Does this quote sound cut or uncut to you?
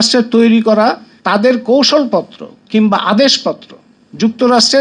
cut